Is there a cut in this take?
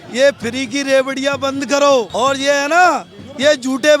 yes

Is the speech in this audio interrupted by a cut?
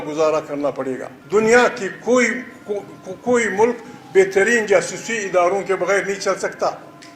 yes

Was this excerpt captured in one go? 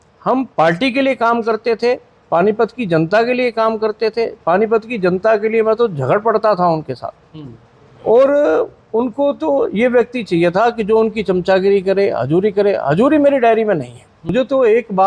no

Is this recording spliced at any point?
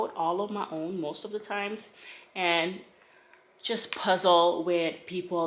no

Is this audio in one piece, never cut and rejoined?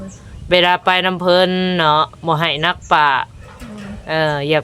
yes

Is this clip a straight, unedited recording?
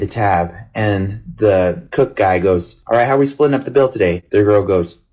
yes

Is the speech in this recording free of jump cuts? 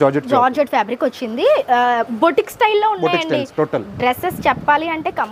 yes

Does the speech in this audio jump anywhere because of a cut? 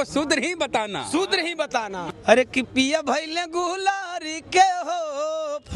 yes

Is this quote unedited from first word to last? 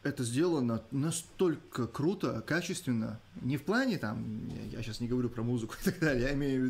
yes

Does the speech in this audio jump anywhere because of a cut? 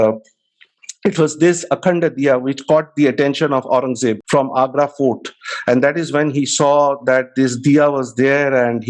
no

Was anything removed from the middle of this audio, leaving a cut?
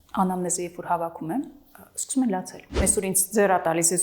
yes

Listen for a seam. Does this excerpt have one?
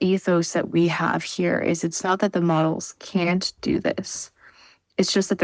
no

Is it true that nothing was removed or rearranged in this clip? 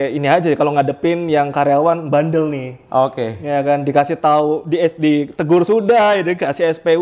yes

